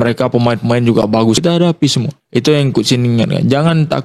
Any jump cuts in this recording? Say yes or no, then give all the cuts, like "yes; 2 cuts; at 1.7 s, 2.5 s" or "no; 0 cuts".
yes; 1 cut; at 1.4 s